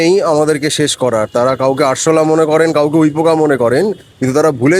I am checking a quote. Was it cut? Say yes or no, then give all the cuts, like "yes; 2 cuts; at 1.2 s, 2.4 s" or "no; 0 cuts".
no; 0 cuts